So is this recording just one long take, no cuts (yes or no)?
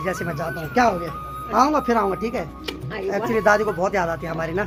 yes